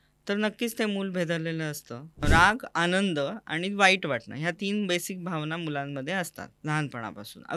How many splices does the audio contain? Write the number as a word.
one